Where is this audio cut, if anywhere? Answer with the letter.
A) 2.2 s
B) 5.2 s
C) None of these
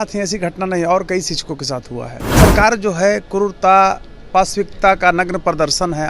A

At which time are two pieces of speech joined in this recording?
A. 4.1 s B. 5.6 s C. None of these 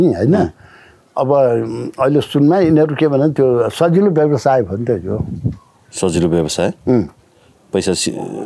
C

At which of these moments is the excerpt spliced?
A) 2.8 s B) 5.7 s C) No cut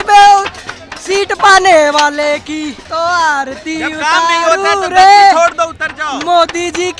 A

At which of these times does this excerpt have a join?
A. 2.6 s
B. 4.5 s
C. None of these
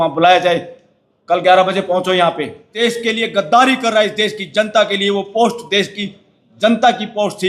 A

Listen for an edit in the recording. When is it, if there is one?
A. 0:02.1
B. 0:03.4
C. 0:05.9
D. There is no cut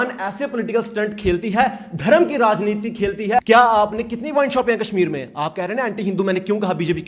B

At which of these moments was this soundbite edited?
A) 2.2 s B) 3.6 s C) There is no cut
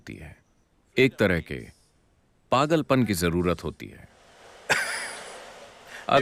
C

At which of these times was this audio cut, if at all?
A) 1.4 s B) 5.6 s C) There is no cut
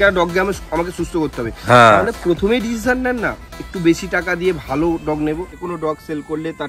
B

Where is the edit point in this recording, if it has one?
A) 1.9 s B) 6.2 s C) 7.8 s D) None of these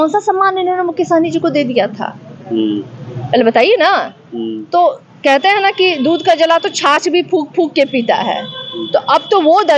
D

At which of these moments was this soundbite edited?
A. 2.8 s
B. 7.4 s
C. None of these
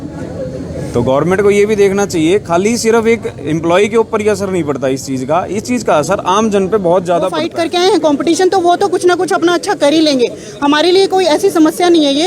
B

